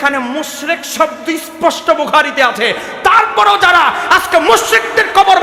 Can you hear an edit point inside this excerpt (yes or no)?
no